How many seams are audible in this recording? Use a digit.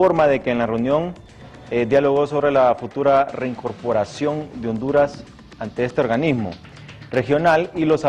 0